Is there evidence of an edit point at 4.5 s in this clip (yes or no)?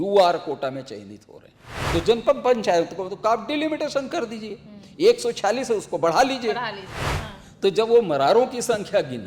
no